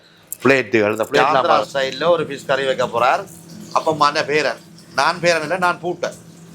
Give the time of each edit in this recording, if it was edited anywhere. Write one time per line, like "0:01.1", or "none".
0:01.4